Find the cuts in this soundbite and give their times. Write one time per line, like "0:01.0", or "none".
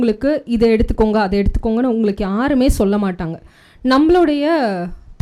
none

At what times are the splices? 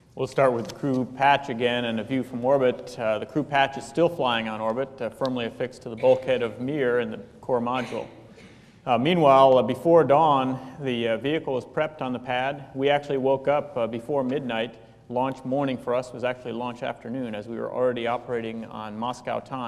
none

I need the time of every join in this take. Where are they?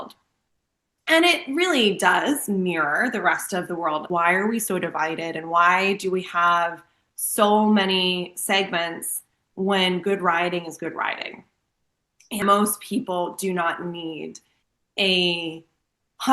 0:04.0
0:12.4

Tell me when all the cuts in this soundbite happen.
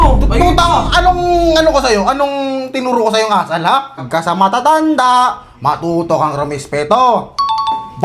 0:04.1

